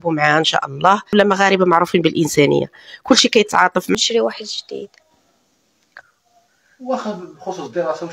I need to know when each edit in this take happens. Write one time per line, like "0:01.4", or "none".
0:01.1
0:04.0